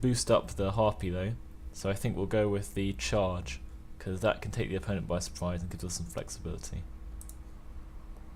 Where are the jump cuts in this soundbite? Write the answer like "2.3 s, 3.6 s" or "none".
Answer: 1.5 s